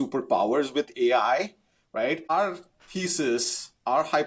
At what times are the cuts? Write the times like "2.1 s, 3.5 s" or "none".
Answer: 2.3 s